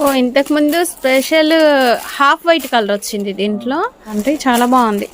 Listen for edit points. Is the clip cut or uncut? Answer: cut